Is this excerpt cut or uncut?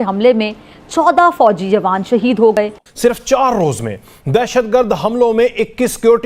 cut